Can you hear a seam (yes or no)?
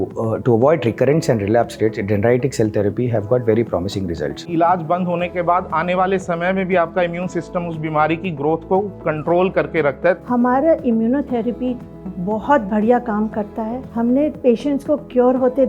yes